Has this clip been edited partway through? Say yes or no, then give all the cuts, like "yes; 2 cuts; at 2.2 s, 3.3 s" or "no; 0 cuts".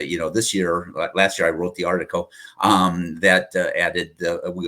no; 0 cuts